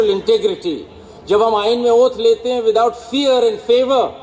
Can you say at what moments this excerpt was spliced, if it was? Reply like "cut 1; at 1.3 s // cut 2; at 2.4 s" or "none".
none